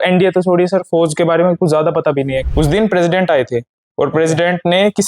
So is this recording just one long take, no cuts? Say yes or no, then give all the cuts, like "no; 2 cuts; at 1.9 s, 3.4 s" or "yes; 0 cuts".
no; 1 cut; at 2.4 s